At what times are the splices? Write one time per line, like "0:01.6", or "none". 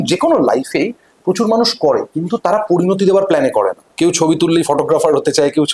0:03.8